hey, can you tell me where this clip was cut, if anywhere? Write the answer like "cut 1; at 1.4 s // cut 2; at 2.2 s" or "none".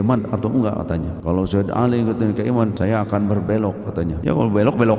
cut 1; at 1.1 s // cut 2; at 2.8 s // cut 3; at 4.2 s